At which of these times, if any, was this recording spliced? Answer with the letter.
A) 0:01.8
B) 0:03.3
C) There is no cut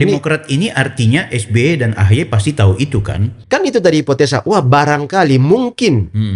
B